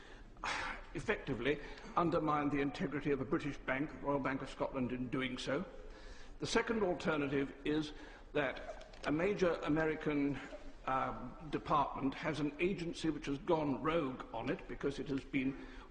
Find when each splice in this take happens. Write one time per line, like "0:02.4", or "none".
0:14.7